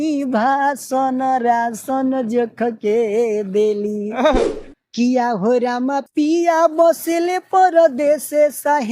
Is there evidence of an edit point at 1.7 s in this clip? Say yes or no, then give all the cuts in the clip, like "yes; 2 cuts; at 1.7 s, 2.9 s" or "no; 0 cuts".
no; 1 cut; at 4.5 s